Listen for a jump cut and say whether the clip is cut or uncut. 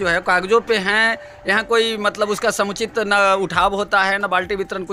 uncut